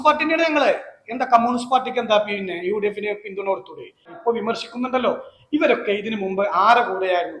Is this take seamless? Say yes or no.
no